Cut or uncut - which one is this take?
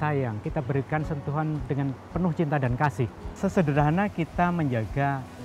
cut